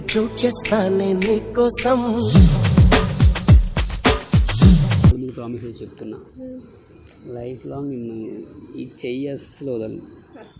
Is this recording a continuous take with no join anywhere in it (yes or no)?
no